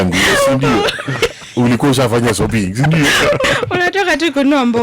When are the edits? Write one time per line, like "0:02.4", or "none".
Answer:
0:03.4